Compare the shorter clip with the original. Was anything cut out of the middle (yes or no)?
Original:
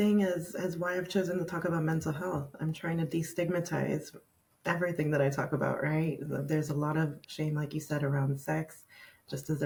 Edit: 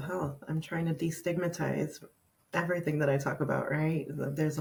no